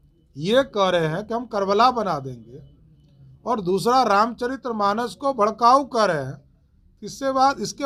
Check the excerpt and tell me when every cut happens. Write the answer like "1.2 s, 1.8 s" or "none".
none